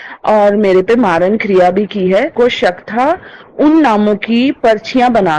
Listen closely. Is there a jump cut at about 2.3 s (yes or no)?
yes